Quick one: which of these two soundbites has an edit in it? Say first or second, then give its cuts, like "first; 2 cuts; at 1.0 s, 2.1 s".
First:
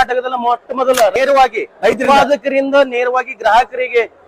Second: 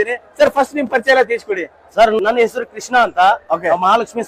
first; 1 cut; at 1.1 s